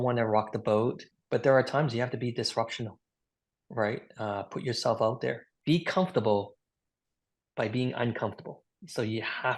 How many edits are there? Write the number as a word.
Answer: one